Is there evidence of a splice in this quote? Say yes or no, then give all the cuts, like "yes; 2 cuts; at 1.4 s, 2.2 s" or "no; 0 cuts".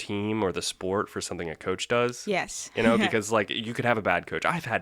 no; 0 cuts